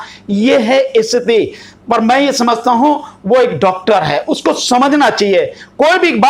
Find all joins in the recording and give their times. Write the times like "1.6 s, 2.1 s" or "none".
none